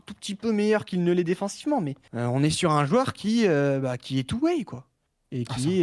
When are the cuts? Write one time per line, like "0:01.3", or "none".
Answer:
0:02.0